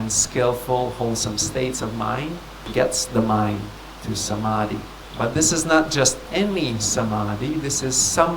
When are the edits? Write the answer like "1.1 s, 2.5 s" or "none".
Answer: 2.7 s, 5.0 s